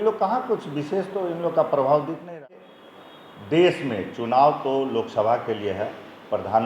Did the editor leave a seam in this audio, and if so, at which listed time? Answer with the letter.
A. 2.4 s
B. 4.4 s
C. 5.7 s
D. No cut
A